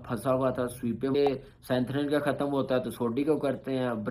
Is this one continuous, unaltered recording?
no; 1 cut; at 1.1 s

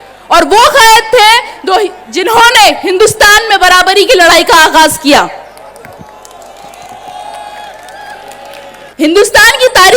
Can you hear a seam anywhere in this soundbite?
yes; 1 cut; at 8.9 s

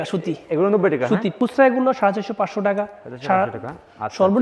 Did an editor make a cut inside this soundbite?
yes; 1 cut; at 1.3 s

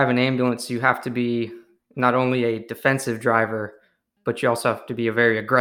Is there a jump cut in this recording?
no; 0 cuts

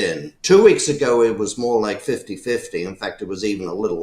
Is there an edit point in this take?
no; 0 cuts

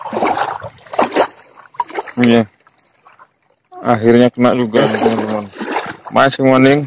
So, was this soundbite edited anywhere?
yes; 1 cut; at 5.6 s

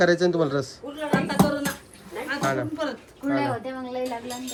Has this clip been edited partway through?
no; 0 cuts

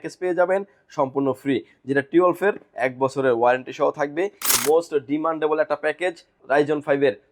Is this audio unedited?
no; 2 cuts; at 4.5 s, 6.3 s

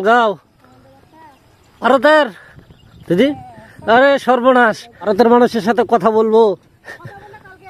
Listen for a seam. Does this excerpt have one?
yes; 2 cuts; at 1.8 s, 5.1 s

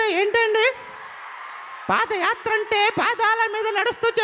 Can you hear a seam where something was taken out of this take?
no; 0 cuts

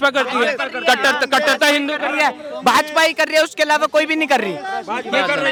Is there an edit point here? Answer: no; 0 cuts

